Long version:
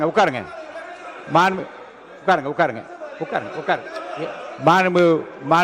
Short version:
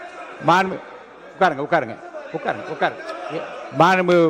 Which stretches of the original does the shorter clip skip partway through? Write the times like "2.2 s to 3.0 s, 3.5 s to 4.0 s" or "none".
none